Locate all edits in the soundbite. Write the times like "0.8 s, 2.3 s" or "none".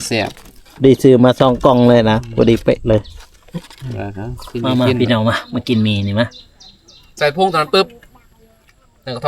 4.6 s